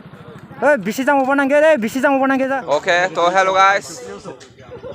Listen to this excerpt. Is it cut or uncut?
cut